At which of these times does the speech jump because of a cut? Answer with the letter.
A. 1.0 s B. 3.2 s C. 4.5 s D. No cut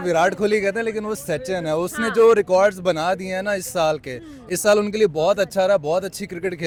D